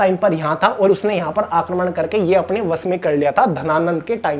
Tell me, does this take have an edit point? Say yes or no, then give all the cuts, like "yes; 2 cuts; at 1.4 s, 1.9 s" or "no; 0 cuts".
no; 0 cuts